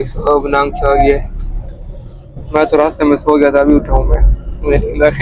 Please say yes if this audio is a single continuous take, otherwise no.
yes